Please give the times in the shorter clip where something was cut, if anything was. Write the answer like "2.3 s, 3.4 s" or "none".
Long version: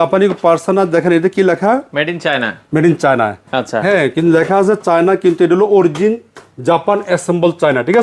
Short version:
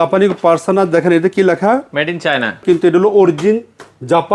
2.6 s